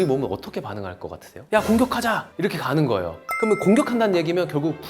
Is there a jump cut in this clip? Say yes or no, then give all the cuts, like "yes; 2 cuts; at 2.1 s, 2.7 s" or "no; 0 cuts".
yes; 2 cuts; at 1.4 s, 3.2 s